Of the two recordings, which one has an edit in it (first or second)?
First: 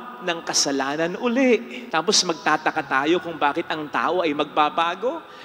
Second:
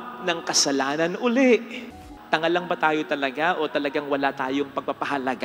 second